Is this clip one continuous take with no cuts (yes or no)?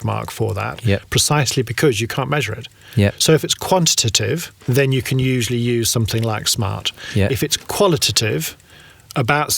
no